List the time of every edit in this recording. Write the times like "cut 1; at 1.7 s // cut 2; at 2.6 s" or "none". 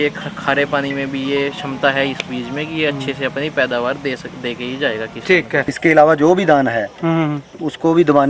cut 1; at 5.6 s